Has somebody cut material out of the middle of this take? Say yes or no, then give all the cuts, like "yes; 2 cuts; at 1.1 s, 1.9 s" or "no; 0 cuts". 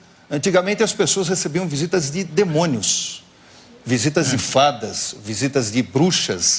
no; 0 cuts